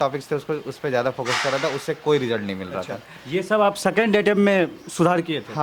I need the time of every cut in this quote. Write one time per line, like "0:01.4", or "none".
none